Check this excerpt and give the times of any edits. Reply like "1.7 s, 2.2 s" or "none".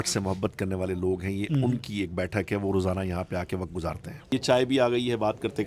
4.1 s